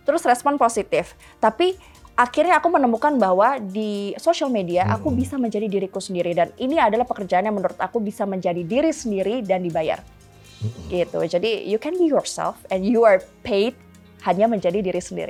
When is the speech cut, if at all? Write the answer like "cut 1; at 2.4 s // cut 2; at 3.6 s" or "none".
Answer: none